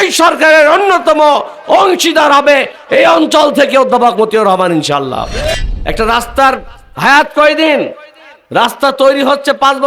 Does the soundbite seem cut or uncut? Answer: cut